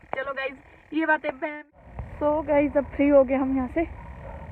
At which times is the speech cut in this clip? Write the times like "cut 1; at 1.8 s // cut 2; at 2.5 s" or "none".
cut 1; at 1.6 s